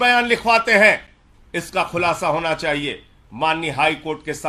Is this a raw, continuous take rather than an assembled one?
yes; 0 cuts

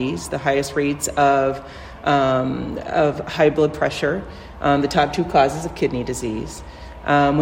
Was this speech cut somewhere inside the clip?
no; 0 cuts

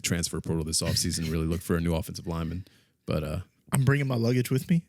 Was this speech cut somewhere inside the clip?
yes; 1 cut; at 3.5 s

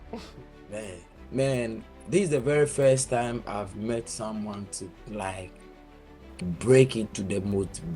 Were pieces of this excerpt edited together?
yes; 1 cut; at 1.2 s

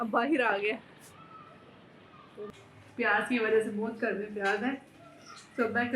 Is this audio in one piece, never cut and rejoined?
no; 1 cut; at 2.4 s

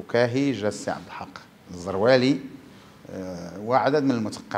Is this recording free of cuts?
yes; 0 cuts

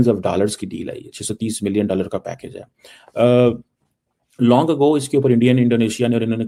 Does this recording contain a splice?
no; 0 cuts

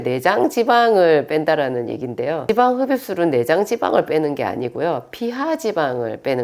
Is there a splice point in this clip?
yes; 1 cut; at 2.4 s

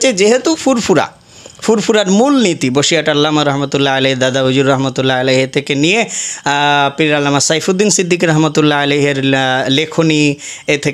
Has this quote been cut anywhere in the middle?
no; 0 cuts

